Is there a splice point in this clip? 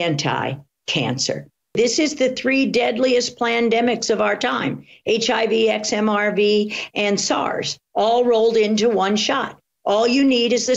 yes; 1 cut; at 1.8 s

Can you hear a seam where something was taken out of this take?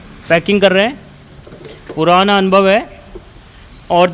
no; 0 cuts

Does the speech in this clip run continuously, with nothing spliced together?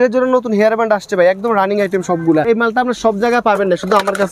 no; 1 cut; at 2.5 s

